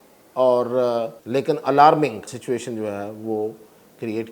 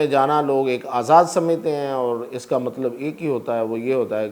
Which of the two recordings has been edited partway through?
first; 2 cuts; at 1.2 s, 2.3 s

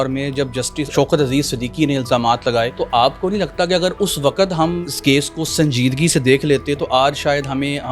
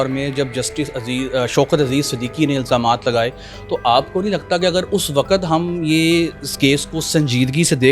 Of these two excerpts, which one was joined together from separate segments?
first; 3 cuts; at 0.9 s, 2.8 s, 4.8 s

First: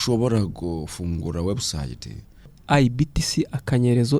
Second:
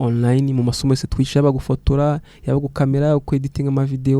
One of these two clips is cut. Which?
first; 1 cut; at 2.6 s

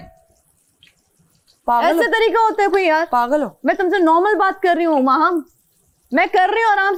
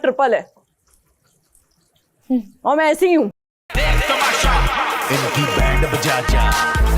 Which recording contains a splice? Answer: second; 1 cut; at 3.6 s

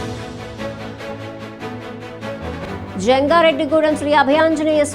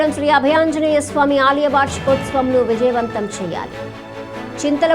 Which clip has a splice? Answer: first; 1 cut; at 2.0 s

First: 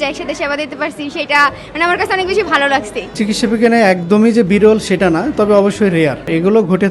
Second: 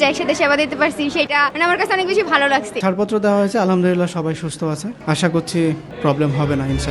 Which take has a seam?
second; 2 cuts; at 1.3 s, 2.8 s

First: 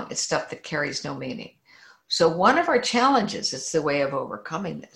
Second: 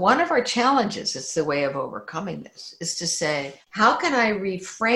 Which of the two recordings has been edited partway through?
second; 1 cut; at 3.6 s

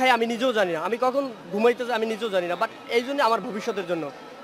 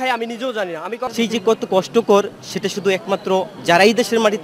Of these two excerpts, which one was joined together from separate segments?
second; 1 cut; at 1.1 s

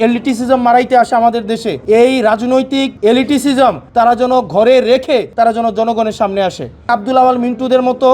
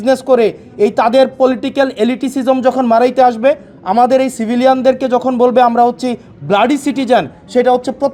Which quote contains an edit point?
first; 5 cuts; at 1.7 s, 2.9 s, 3.8 s, 5.3 s, 6.9 s

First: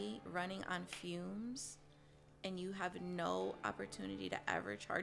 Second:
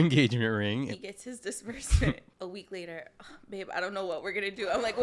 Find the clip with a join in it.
second; 2 cuts; at 0.9 s, 2.3 s

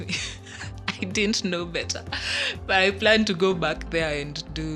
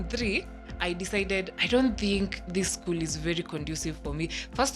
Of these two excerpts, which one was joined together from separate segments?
second; 1 cut; at 1.5 s

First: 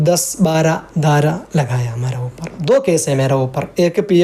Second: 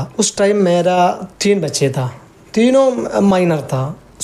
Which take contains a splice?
first; 1 cut; at 2.6 s

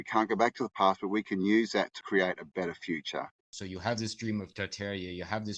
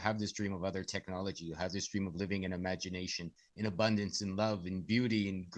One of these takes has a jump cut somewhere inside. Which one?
first; 2 cuts; at 2.0 s, 3.5 s

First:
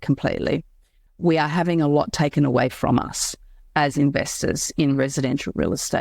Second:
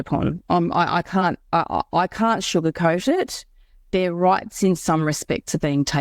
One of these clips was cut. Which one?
first; 1 cut; at 1.0 s

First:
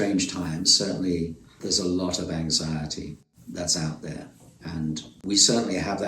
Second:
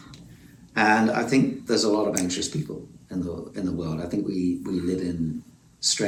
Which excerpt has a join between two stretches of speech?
first; 3 cuts; at 1.5 s, 3.3 s, 5.1 s

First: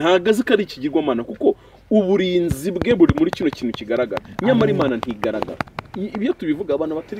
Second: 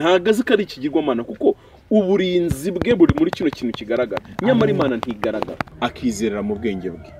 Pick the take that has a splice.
second; 1 cut; at 5.6 s

